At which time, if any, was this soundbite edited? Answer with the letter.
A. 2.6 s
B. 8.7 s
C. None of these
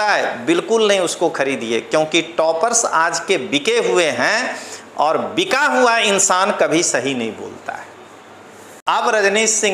B